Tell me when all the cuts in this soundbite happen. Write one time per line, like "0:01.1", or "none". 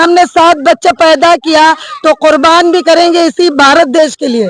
none